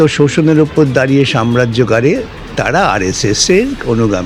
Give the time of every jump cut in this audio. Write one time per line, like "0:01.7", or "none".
none